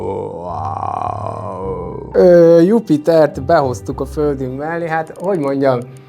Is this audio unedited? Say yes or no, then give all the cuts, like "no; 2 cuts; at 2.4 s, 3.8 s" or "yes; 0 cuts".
no; 1 cut; at 1.9 s